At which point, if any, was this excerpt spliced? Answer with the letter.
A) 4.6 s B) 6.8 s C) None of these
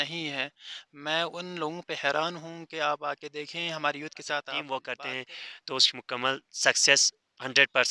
A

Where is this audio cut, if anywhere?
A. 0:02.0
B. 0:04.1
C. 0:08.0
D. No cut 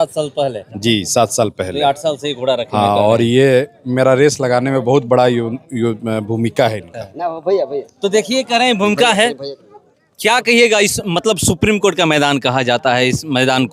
D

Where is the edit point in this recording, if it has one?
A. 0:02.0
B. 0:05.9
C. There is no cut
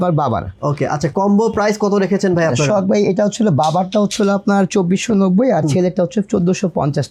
C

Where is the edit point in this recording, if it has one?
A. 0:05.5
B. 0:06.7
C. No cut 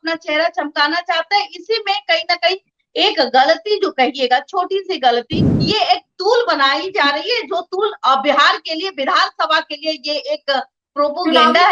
A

